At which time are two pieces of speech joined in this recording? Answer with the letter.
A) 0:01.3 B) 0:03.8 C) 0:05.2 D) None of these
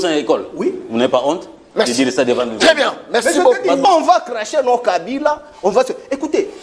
B